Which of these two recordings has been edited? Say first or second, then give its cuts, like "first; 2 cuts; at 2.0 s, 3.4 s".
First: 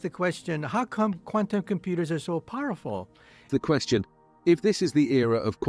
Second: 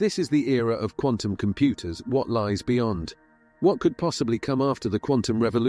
first; 1 cut; at 3.5 s